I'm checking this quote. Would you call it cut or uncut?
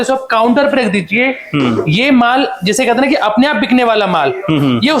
uncut